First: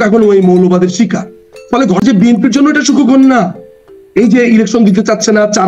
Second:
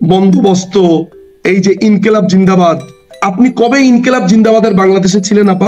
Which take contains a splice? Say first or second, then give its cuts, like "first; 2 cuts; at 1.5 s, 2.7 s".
first; 1 cut; at 2.0 s